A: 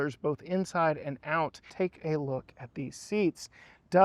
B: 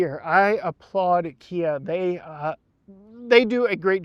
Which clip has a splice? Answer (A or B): A